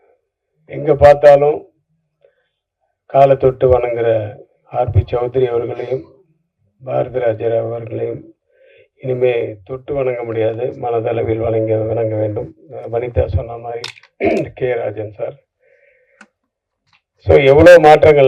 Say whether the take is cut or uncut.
uncut